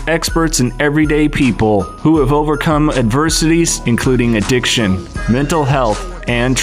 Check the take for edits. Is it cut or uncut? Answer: uncut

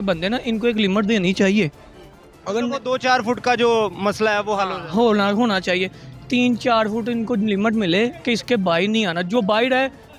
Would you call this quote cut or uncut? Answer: uncut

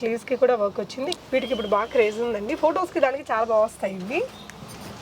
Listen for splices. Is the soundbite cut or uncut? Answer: cut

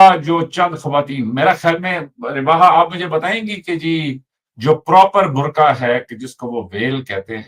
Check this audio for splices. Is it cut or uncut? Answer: uncut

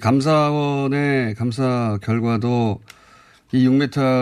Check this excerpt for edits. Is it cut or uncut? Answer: cut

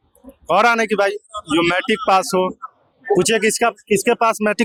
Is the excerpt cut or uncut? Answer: uncut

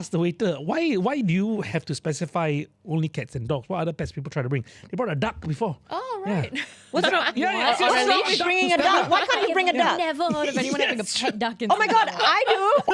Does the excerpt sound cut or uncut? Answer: uncut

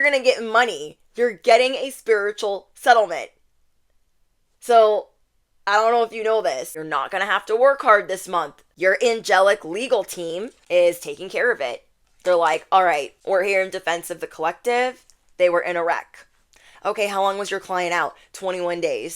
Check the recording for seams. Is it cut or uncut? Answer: cut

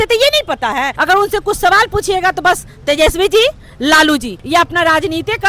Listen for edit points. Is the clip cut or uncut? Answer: cut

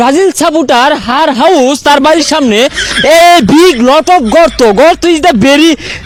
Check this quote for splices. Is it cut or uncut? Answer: uncut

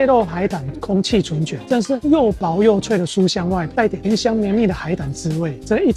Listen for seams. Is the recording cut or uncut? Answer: uncut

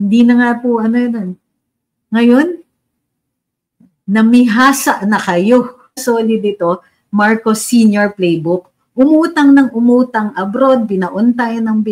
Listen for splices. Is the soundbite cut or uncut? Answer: cut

